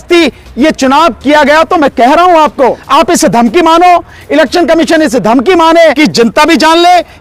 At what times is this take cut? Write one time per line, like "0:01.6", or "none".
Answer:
0:02.8
0:06.0